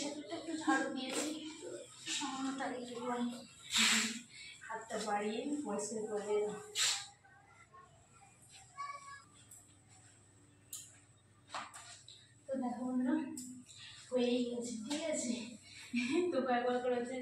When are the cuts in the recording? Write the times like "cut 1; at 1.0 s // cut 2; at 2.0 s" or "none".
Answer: cut 1; at 9.2 s